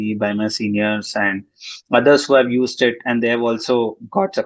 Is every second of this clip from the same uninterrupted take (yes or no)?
yes